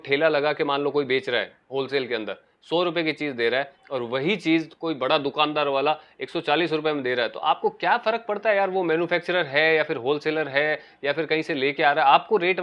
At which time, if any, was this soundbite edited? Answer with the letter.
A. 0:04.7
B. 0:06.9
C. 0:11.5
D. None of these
D